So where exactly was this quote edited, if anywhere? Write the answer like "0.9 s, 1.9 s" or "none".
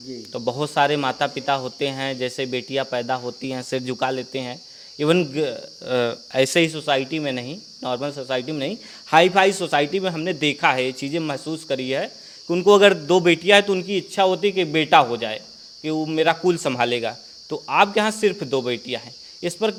none

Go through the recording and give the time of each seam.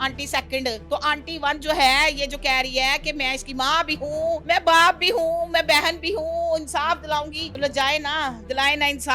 0.8 s, 4.4 s, 7.4 s

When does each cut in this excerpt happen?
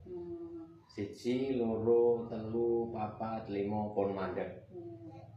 none

